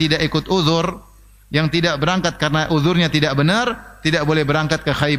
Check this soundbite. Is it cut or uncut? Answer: uncut